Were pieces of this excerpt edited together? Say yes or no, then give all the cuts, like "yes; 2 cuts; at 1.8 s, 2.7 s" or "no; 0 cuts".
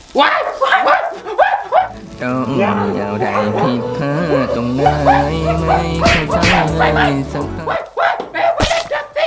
no; 0 cuts